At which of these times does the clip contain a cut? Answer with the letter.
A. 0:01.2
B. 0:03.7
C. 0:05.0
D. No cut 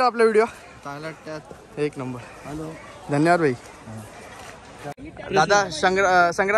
C